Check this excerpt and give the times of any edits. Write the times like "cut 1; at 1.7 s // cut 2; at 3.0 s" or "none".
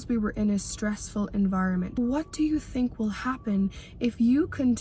cut 1; at 2.0 s

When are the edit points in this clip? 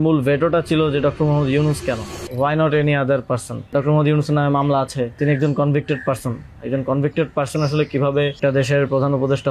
cut 1; at 2.2 s // cut 2; at 3.7 s // cut 3; at 5.2 s // cut 4; at 8.4 s

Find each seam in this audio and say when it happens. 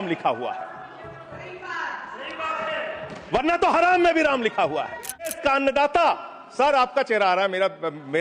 cut 1; at 5.4 s

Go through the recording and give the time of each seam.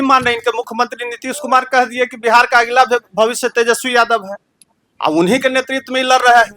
none

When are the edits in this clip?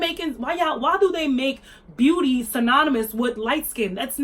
none

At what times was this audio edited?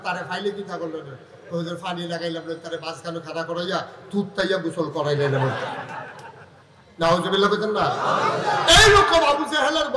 none

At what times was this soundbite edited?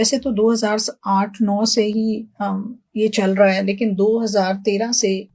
none

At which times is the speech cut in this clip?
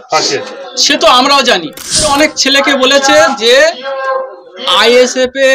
cut 1; at 2.1 s

